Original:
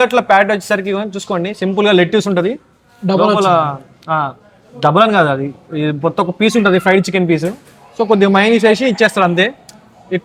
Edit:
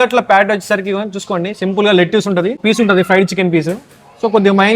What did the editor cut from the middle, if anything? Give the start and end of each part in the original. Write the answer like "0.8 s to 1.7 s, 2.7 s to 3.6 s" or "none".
2.6 s to 6.3 s